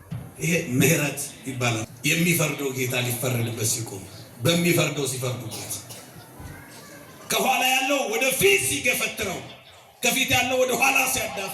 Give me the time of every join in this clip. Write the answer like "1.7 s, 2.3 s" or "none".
1.9 s